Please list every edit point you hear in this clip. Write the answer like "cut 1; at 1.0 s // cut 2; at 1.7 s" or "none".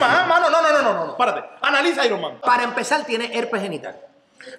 cut 1; at 2.4 s